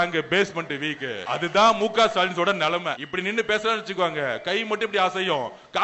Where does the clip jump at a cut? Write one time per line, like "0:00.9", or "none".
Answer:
0:01.2
0:03.0